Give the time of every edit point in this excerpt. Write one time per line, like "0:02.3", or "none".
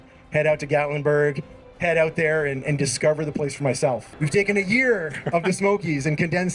0:04.1